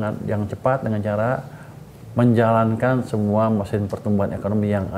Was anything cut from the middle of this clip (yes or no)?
no